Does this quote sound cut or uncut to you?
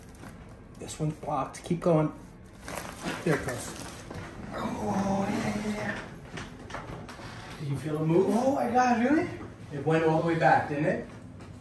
uncut